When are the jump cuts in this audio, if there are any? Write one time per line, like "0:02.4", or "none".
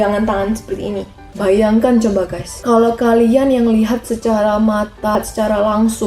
0:01.3